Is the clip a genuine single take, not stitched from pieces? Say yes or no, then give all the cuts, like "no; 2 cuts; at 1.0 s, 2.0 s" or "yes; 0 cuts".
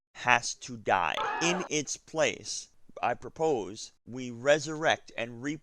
no; 1 cut; at 1.3 s